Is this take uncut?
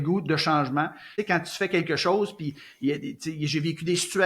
yes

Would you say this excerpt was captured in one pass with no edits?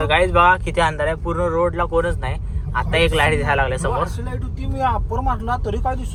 yes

